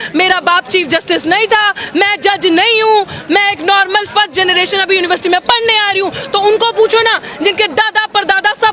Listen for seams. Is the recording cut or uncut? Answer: uncut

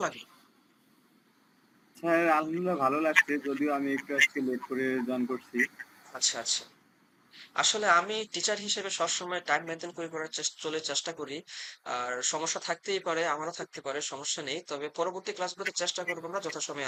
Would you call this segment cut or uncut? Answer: uncut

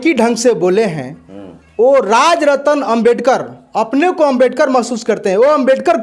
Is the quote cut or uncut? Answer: uncut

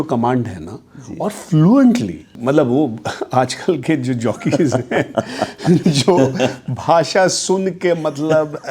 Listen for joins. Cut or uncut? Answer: cut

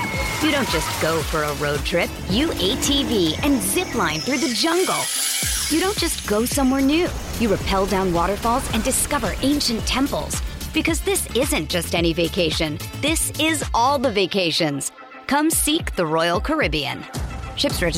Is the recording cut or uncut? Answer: uncut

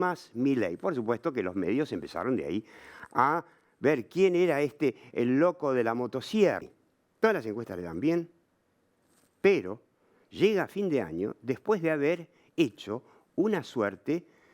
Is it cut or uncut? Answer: cut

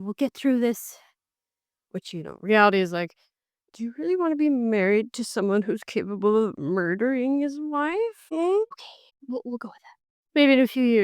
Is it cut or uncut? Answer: cut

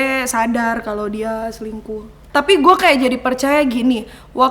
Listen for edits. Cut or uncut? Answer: cut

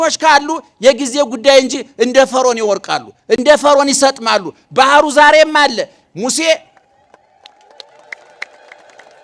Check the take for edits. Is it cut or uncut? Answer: uncut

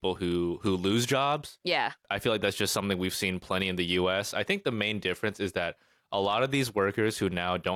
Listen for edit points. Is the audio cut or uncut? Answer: cut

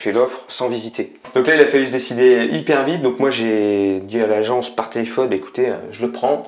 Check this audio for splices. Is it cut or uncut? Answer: cut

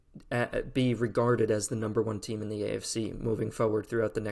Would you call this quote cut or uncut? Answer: uncut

